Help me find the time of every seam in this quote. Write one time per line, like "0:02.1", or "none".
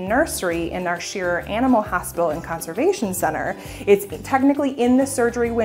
none

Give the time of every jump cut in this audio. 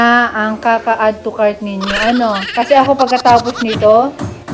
0:02.4

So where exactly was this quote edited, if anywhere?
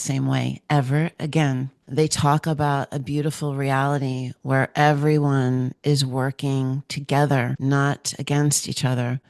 0:01.8
0:07.5

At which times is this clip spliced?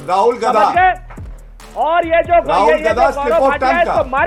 none

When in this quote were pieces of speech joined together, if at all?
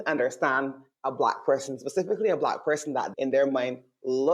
0:03.1

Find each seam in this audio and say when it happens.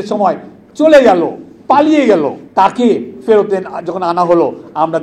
0:01.5
0:02.4

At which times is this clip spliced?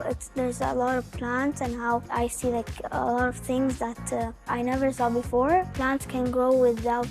0:02.1
0:04.5
0:05.7

